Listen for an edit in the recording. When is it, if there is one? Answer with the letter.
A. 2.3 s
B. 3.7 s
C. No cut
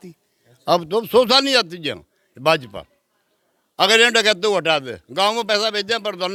C